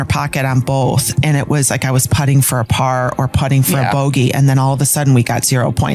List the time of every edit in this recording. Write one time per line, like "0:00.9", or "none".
0:01.1